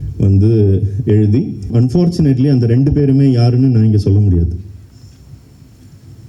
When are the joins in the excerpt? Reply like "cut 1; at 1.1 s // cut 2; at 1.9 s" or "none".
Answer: cut 1; at 1.7 s